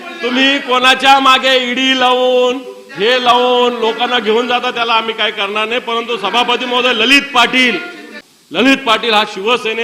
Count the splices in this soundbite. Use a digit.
1